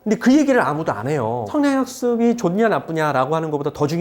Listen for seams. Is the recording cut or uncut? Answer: cut